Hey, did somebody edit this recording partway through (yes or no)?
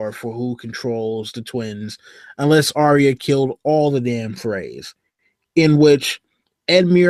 no